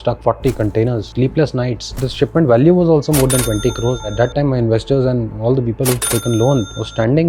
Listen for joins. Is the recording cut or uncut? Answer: cut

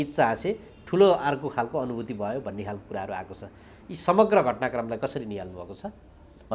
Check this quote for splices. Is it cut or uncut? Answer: uncut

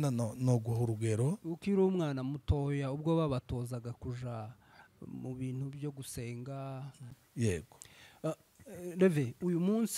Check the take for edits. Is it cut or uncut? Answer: cut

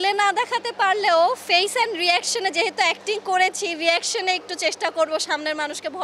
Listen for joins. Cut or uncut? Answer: uncut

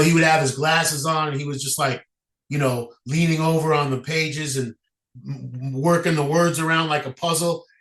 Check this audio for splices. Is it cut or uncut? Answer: uncut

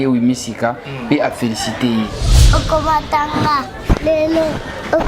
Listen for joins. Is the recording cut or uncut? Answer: cut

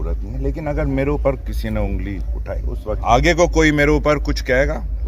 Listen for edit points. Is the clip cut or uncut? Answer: cut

